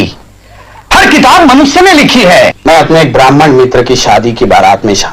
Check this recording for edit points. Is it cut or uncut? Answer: cut